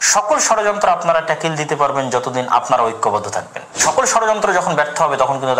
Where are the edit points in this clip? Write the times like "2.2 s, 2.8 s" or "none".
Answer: 3.7 s